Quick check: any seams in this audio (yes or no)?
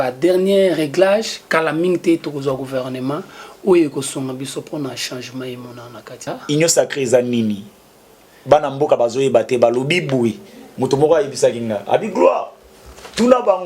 yes